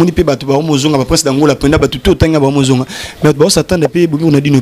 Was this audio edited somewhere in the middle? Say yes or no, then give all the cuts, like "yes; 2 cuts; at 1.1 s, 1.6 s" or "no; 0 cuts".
no; 0 cuts